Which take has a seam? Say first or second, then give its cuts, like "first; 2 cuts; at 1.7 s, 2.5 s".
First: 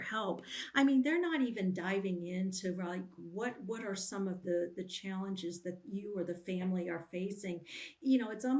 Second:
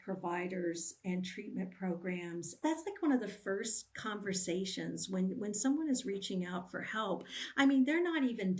second; 1 cut; at 2.6 s